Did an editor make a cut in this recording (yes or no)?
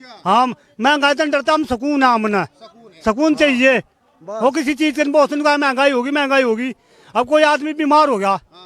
no